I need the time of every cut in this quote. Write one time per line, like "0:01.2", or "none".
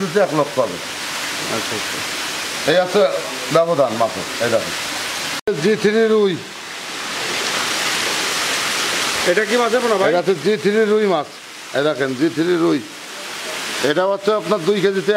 none

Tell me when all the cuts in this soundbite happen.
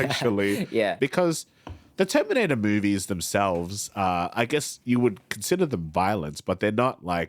0:00.9

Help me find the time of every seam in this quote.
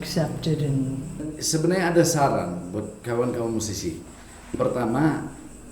0:01.3

